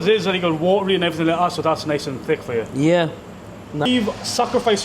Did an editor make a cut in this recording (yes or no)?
yes